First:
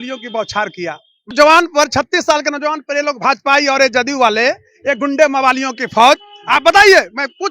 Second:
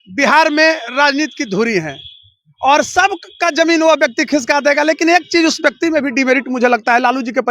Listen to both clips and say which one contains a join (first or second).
first